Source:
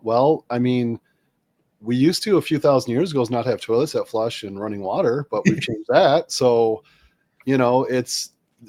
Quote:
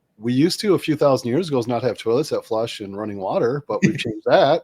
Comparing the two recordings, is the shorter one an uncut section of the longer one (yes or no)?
yes